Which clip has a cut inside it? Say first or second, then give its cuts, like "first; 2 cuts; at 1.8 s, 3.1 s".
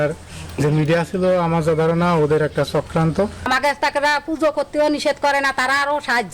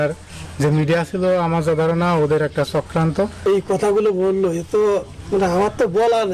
first; 1 cut; at 3.4 s